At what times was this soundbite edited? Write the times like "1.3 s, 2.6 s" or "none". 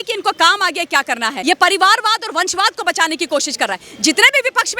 1.4 s